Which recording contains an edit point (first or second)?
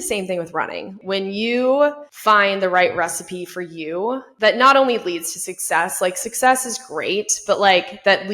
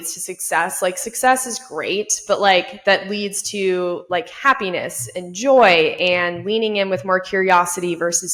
first